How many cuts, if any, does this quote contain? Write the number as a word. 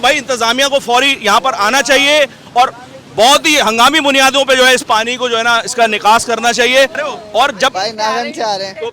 one